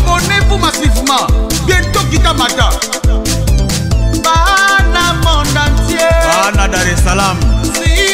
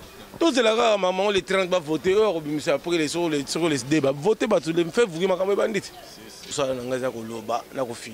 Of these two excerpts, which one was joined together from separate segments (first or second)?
second